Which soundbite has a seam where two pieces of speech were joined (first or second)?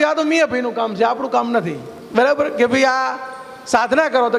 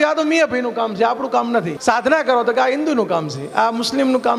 second